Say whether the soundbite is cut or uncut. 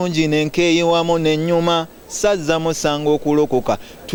uncut